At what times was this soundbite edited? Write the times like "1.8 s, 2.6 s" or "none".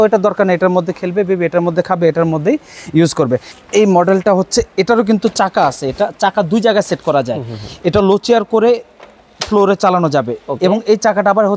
3.5 s